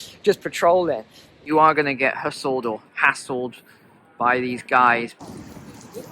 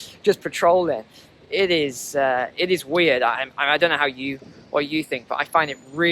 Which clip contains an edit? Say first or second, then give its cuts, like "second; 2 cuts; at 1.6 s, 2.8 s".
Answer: first; 2 cuts; at 1.5 s, 5.2 s